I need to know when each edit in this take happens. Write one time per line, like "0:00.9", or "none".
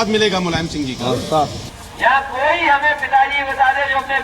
0:01.8